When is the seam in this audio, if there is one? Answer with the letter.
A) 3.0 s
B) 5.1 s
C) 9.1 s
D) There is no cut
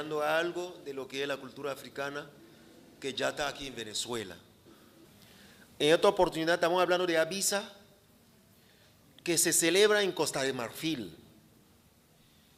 D